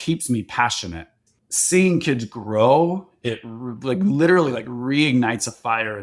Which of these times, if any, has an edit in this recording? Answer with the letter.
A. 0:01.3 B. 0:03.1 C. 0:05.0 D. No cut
A